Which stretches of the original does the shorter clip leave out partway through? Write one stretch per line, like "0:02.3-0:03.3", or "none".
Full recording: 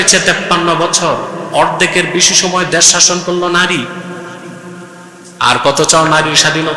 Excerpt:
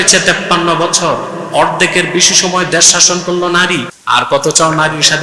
0:03.9-0:05.3